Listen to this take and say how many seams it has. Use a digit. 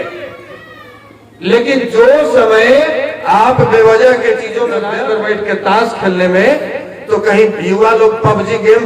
1